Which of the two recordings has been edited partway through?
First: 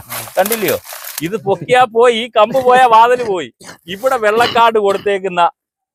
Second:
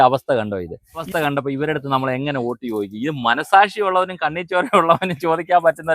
second; 1 cut; at 1.1 s

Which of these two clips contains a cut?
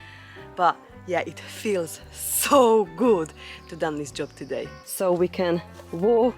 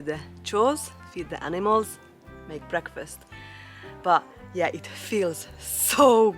first; 1 cut; at 4.7 s

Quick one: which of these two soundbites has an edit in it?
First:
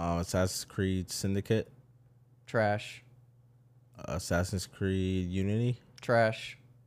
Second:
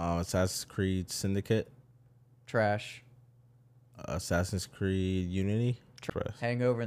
second; 1 cut; at 6.0 s

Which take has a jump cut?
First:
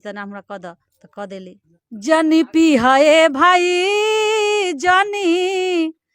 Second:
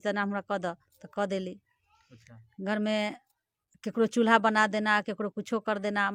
first; 1 cut; at 1.7 s

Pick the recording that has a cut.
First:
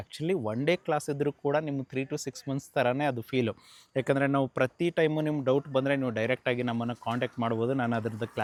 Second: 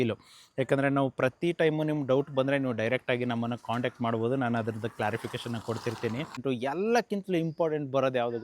second; 1 cut; at 6.4 s

